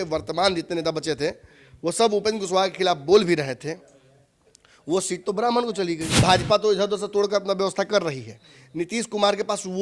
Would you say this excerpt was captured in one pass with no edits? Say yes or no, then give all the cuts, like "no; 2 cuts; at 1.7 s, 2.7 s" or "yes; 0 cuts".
no; 1 cut; at 6.1 s